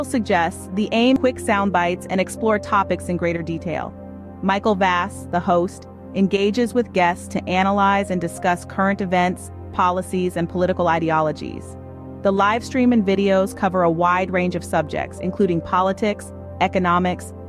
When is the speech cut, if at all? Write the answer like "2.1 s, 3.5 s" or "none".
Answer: 1.2 s